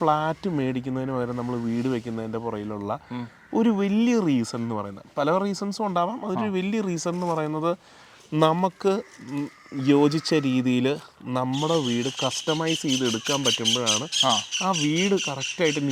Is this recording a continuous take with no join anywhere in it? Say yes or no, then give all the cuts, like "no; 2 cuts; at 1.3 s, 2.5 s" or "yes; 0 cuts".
yes; 0 cuts